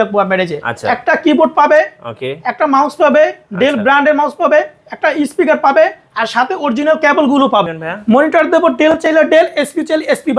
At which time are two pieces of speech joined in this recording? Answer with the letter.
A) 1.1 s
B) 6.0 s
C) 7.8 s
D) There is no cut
C